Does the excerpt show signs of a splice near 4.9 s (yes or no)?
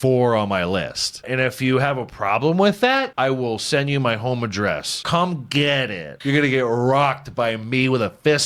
yes